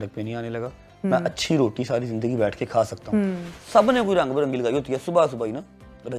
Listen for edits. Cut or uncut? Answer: cut